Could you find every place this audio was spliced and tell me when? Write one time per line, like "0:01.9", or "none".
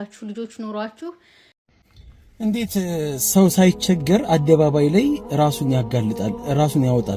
0:01.5